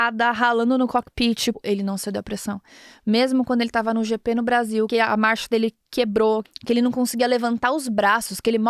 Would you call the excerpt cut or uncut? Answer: cut